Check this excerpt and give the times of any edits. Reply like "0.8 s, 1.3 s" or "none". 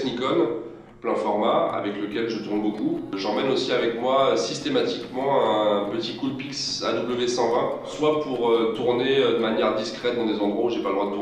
5.6 s